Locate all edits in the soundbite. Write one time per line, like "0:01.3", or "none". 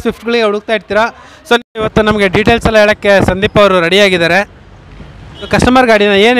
0:01.6
0:05.5